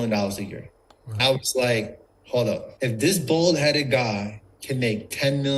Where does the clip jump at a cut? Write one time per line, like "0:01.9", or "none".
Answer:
0:01.2
0:02.7